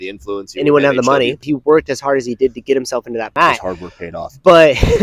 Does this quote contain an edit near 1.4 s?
yes; 2 cuts; at 1.4 s, 3.3 s

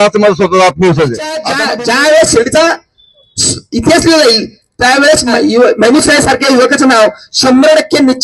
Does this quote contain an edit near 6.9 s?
no; 2 cuts; at 1.5 s, 5.3 s

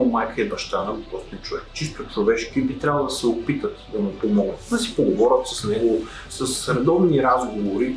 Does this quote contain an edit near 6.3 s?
yes; 3 cuts; at 1.8 s, 4.6 s, 6.3 s

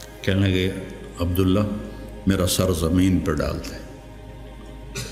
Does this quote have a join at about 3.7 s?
no; 0 cuts

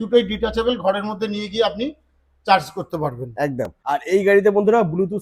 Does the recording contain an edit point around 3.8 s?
yes; 1 cut; at 3.8 s

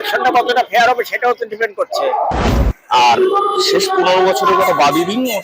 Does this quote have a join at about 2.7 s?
yes; 1 cut; at 2.7 s

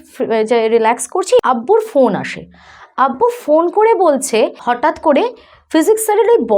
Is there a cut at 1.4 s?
yes; 2 cuts; at 1.4 s, 4.6 s

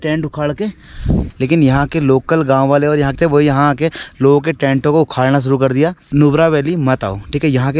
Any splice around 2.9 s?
no; 2 cuts; at 1.3 s, 6.1 s

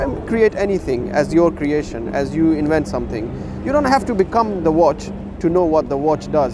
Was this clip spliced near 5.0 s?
no; 0 cuts

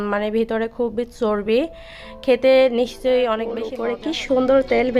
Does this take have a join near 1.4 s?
no; 1 cut; at 3.7 s

